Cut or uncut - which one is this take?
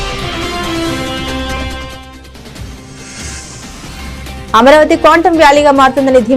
cut